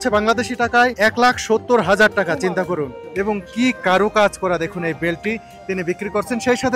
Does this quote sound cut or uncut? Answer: cut